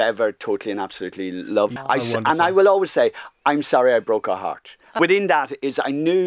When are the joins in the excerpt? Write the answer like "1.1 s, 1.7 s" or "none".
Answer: 1.7 s, 5.0 s